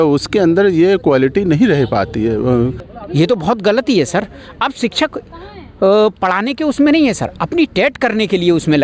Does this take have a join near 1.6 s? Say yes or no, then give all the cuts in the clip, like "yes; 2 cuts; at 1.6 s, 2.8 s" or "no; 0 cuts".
no; 1 cut; at 2.9 s